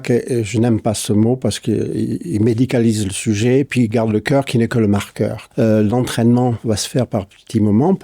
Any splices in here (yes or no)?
yes